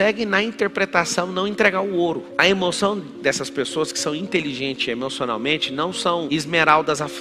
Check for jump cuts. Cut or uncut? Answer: uncut